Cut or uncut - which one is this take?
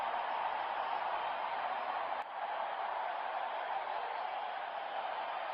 uncut